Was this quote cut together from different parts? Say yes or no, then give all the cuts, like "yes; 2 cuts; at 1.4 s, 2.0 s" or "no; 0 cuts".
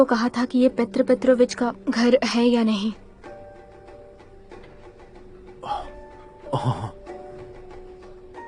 no; 0 cuts